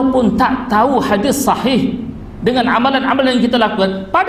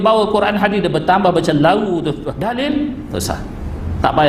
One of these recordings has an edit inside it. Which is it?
second; 1 cut; at 2.3 s

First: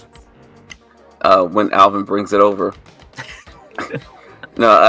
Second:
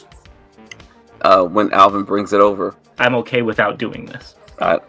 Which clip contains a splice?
second; 1 cut; at 2.8 s

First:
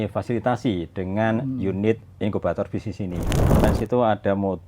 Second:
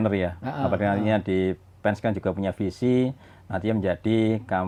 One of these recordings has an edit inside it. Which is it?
first; 1 cut; at 3.6 s

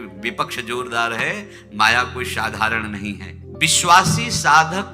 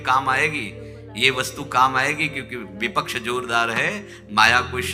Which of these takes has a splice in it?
first; 1 cut; at 3.5 s

